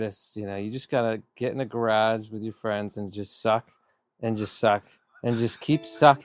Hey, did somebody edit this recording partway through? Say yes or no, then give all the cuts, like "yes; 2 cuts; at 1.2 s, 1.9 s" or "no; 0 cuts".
no; 0 cuts